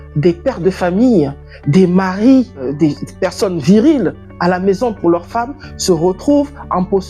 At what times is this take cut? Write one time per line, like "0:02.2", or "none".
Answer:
0:02.7